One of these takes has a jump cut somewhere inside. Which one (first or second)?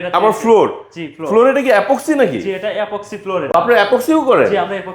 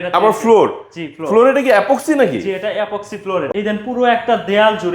second